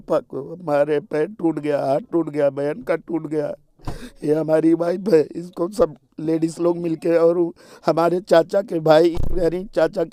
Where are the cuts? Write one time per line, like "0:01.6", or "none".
none